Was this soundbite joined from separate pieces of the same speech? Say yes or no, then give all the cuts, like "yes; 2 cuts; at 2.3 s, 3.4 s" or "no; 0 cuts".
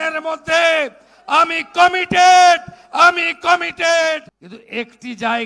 yes; 1 cut; at 4.4 s